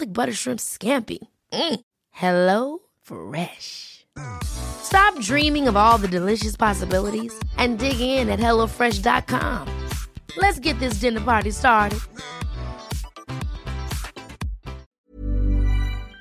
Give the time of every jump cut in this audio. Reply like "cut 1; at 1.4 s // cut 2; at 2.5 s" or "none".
cut 1; at 14.9 s